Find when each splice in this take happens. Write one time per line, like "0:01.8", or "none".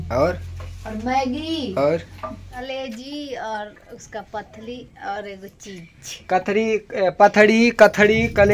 0:02.6